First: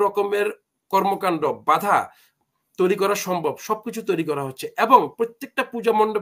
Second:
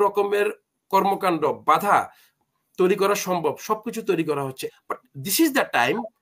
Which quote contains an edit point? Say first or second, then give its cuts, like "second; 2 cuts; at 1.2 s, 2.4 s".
second; 1 cut; at 4.7 s